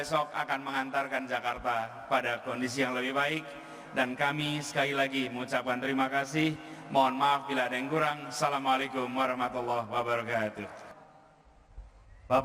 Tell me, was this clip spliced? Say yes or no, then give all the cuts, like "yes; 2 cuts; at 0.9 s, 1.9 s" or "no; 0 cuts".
yes; 1 cut; at 10.9 s